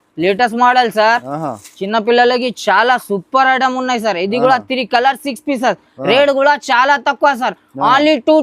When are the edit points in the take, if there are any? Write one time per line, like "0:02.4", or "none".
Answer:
none